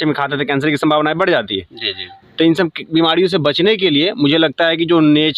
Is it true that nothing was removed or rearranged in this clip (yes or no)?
yes